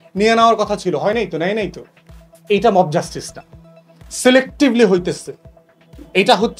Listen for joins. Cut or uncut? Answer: uncut